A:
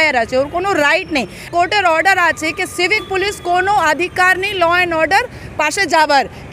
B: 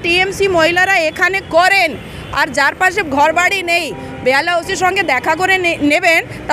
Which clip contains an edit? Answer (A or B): A